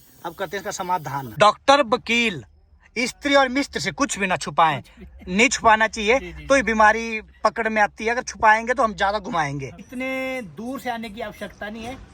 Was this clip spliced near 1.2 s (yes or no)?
yes